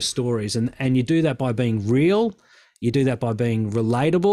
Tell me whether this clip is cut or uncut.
uncut